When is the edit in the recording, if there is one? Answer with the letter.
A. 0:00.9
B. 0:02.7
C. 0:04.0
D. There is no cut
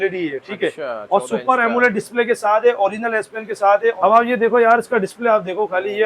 C